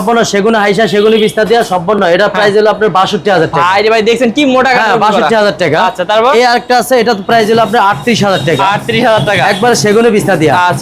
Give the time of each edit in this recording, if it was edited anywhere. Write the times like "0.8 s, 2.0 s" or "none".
none